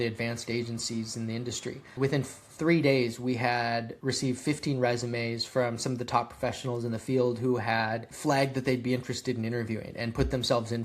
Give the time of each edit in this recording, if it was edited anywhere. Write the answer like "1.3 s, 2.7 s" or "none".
1.9 s, 3.9 s, 8.1 s